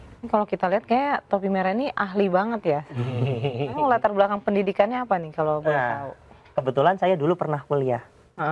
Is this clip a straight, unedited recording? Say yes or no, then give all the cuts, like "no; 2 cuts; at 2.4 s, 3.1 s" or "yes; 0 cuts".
yes; 0 cuts